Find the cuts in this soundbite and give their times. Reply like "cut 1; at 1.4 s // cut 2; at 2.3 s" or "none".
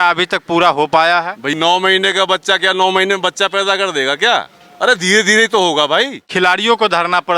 cut 1; at 1.5 s // cut 2; at 6.2 s